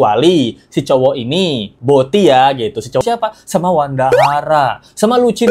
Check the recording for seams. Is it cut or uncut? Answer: cut